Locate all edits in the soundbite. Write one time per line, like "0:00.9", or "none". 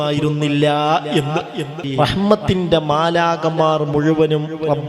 0:01.8